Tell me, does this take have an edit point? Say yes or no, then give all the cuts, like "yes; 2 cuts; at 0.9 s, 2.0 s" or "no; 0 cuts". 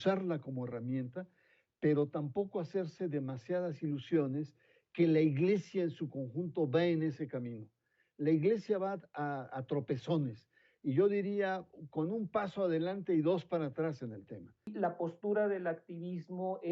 yes; 1 cut; at 14.7 s